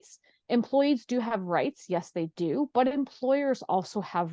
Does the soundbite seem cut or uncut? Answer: uncut